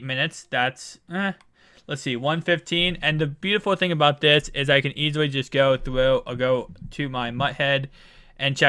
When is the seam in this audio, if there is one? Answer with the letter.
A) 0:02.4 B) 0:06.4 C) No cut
A